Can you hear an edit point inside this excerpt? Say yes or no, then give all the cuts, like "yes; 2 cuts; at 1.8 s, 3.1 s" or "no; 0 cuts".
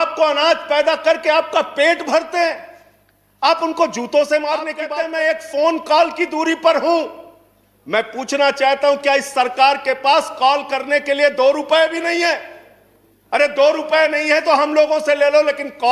yes; 1 cut; at 4.8 s